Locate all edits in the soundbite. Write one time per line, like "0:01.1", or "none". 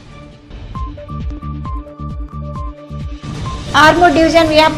0:03.4

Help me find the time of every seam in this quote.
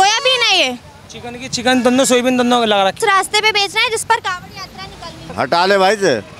0:03.0
0:05.2

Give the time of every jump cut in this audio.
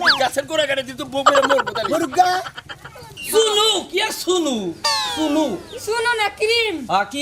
0:03.3

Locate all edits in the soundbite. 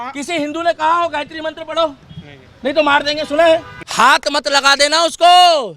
0:03.8

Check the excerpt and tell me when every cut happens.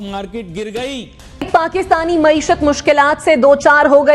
0:01.7

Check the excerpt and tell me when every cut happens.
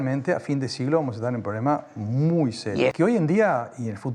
0:02.9

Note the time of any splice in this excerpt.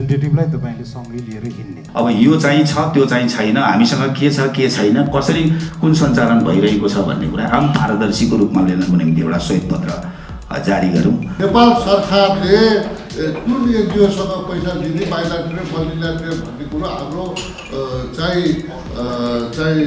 0:01.8
0:11.3

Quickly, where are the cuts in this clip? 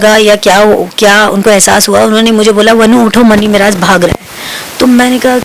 none

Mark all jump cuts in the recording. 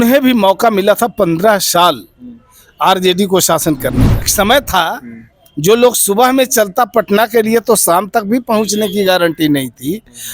0:04.3

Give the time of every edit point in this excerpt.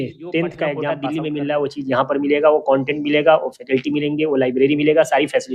0:00.9

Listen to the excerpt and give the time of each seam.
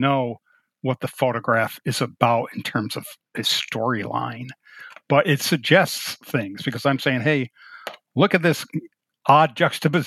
0:04.7

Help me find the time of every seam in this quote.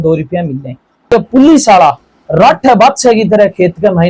0:01.1

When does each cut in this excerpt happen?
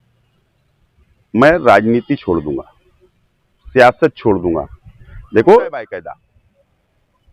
0:05.8

